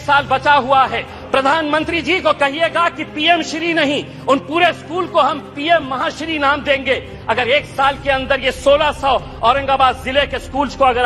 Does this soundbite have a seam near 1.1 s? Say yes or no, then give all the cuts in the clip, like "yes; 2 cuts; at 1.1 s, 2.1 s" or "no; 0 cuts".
yes; 1 cut; at 1.1 s